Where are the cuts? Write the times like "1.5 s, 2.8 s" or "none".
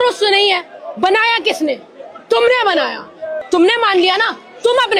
3.3 s